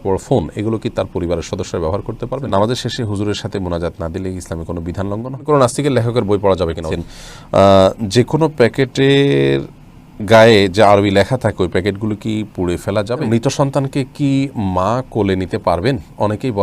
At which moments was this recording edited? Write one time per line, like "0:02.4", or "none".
0:02.5
0:05.4
0:06.9
0:13.3